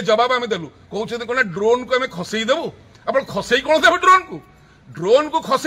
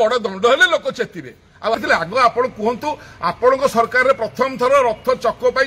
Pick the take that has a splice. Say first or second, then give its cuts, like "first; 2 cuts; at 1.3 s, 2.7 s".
second; 1 cut; at 1.8 s